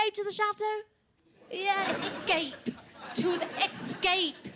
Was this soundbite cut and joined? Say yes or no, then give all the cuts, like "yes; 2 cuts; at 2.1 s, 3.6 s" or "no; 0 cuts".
yes; 1 cut; at 1.8 s